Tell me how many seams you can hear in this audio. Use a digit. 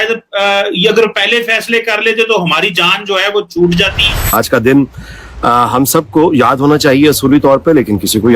1